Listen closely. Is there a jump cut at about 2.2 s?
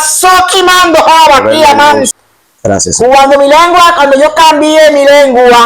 yes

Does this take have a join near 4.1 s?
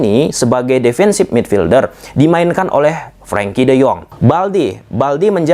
yes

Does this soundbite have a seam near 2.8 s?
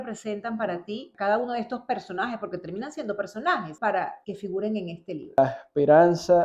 no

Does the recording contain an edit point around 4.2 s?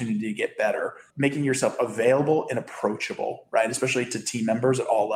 no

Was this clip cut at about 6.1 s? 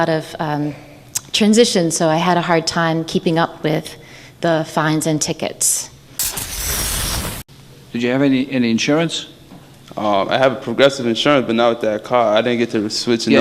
yes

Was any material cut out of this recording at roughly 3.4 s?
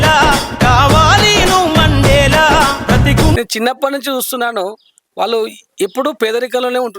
yes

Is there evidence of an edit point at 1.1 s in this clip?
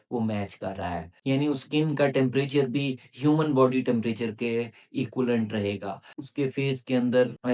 yes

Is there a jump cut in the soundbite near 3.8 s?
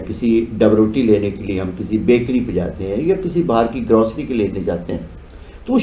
no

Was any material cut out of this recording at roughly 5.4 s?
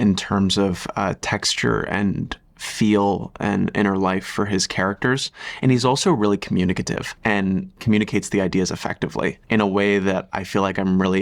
no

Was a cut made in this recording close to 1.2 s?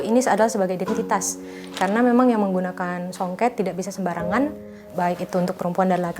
no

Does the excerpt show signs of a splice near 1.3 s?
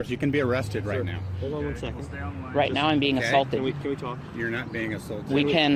no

